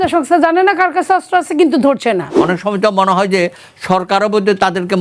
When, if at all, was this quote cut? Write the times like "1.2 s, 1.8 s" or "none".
2.3 s